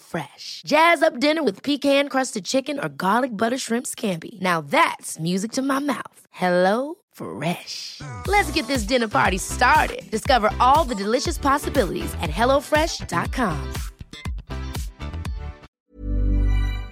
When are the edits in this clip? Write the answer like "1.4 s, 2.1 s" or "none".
15.7 s